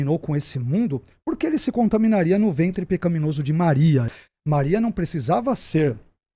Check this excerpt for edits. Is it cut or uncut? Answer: cut